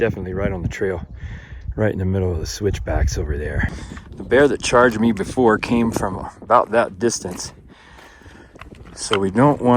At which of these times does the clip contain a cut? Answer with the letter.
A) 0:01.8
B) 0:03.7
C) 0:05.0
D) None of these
B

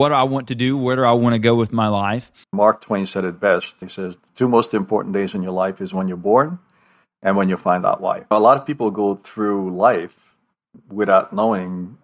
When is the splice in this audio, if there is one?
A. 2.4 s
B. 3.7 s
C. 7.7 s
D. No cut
A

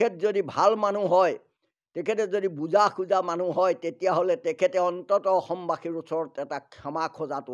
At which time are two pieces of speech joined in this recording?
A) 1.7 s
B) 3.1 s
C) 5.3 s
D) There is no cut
D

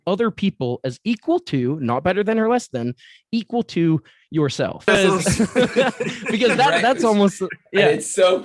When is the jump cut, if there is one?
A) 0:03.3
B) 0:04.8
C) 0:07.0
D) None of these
B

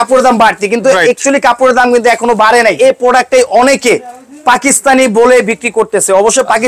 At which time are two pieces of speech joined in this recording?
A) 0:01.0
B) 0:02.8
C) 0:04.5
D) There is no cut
B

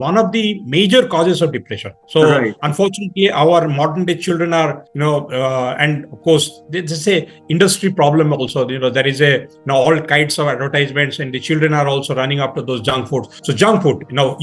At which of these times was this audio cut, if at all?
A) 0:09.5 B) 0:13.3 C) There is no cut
C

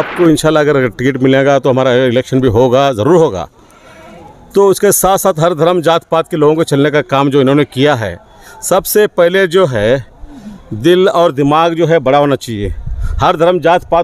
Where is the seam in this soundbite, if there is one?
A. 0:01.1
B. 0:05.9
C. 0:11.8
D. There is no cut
D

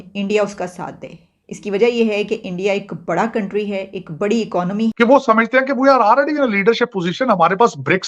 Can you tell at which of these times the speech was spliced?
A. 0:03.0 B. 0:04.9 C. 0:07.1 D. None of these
B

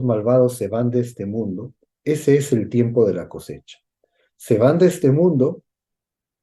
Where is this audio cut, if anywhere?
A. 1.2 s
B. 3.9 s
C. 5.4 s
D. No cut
D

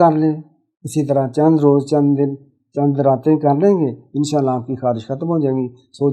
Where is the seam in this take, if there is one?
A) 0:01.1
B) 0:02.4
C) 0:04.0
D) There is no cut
D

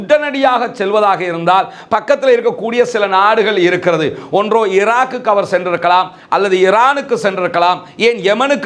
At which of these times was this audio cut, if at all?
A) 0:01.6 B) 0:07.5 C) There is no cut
C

